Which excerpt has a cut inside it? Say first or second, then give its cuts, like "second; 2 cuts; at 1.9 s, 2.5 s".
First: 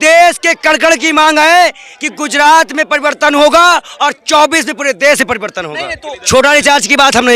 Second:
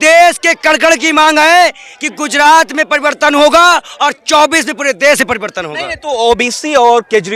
first; 1 cut; at 6.0 s